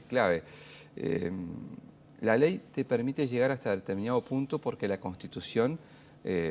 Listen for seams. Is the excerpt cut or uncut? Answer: uncut